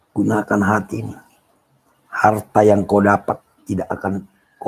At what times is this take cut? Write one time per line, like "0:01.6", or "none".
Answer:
none